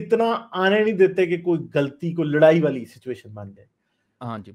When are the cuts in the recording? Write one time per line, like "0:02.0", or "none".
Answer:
none